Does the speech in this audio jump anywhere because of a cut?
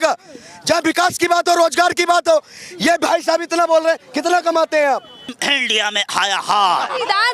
yes; 1 cut; at 5.4 s

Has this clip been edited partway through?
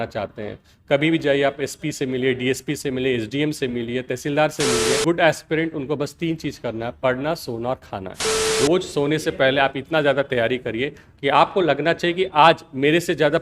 yes; 2 cuts; at 5.0 s, 8.5 s

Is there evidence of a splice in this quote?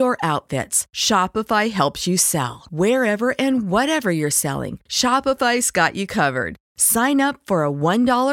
no; 0 cuts

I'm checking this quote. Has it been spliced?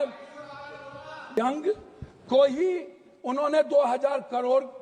yes; 1 cut; at 1.4 s

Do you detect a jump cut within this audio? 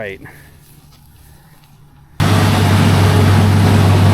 yes; 1 cut; at 2.2 s

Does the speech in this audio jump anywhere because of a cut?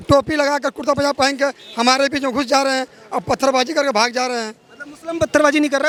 no; 0 cuts

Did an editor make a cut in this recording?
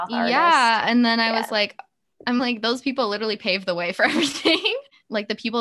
no; 0 cuts

